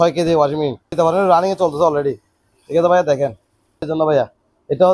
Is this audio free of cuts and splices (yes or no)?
no